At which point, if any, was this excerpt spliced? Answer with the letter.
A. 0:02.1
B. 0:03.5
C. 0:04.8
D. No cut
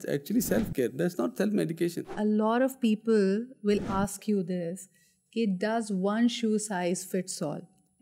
A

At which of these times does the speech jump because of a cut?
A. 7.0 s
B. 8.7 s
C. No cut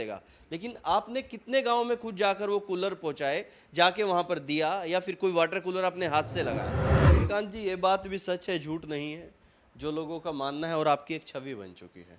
A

